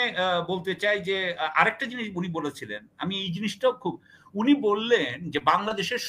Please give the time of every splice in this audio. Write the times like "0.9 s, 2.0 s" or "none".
none